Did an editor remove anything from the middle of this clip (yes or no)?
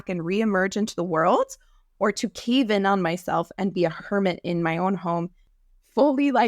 yes